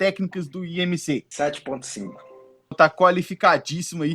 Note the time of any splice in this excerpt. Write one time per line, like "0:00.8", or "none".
0:01.3
0:02.7